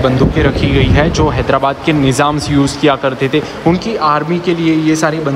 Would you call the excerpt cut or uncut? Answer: uncut